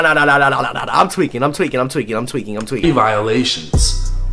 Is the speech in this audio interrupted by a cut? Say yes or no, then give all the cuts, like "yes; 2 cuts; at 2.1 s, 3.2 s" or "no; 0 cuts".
no; 0 cuts